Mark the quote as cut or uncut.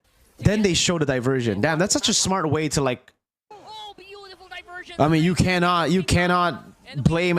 cut